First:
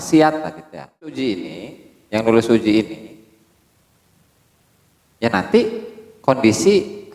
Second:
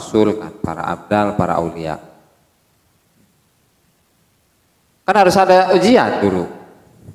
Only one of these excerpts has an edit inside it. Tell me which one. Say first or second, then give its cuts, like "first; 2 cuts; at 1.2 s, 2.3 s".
first; 1 cut; at 1.2 s